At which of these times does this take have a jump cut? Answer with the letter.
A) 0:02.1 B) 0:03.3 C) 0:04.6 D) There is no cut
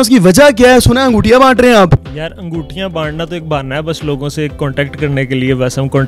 A